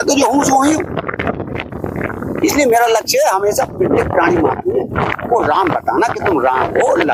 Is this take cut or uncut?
uncut